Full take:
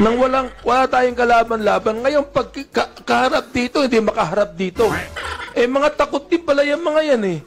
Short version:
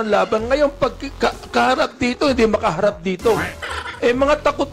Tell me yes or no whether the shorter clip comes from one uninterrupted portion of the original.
yes